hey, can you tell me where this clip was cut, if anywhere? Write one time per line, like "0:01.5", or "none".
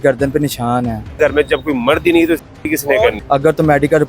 0:01.1
0:03.2